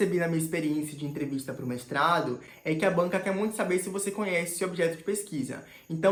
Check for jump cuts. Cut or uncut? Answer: uncut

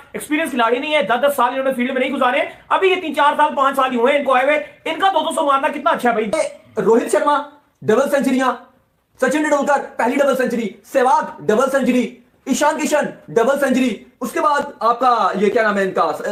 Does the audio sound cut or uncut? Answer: uncut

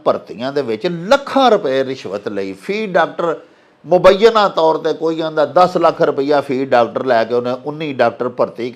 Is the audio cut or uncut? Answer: uncut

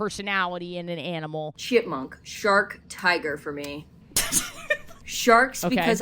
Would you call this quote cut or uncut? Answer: cut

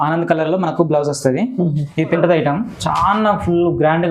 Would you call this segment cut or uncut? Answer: cut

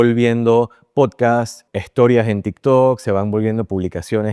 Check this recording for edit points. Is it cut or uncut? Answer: cut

